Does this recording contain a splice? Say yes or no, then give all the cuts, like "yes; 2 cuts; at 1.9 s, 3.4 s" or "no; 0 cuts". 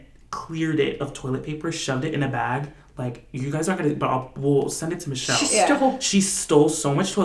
no; 0 cuts